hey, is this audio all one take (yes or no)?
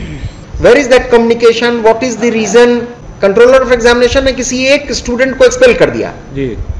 no